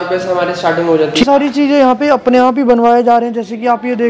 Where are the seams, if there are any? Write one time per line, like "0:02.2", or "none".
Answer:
0:01.2